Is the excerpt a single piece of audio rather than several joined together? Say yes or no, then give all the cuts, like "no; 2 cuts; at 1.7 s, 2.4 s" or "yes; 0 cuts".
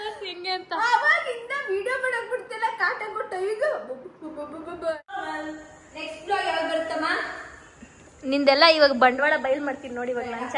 no; 1 cut; at 5.0 s